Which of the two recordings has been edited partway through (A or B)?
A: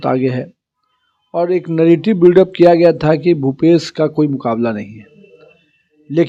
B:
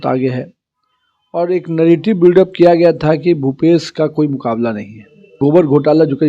B